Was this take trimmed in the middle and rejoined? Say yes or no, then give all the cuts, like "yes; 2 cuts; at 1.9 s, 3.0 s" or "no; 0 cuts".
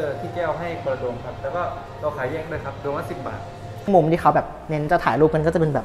yes; 1 cut; at 3.9 s